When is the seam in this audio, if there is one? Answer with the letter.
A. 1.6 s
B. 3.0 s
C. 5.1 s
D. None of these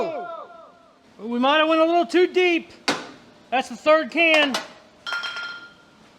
C